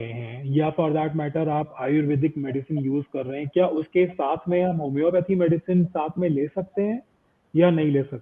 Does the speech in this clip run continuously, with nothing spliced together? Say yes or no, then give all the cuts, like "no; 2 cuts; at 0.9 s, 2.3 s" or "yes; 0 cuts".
yes; 0 cuts